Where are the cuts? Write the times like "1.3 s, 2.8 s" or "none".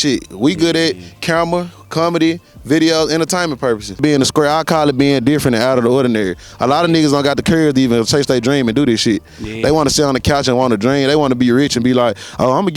4.0 s